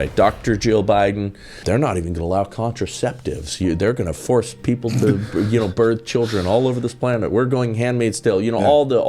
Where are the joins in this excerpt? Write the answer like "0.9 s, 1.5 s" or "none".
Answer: 1.6 s